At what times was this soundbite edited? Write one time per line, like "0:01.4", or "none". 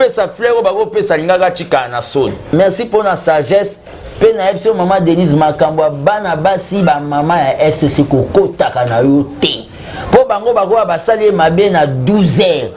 0:02.5

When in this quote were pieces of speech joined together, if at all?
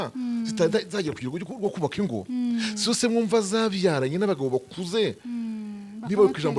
none

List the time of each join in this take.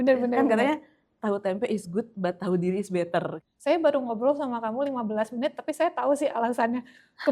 0:03.3

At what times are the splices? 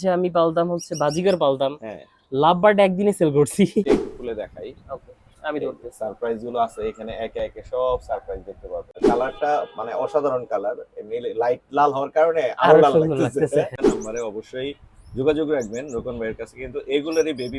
0:03.9
0:09.0
0:13.8

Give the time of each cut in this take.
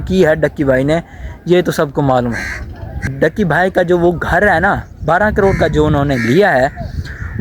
0:03.1

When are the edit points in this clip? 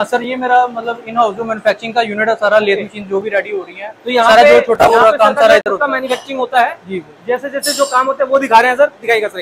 none

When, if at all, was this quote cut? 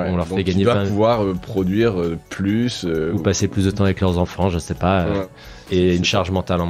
0:05.2

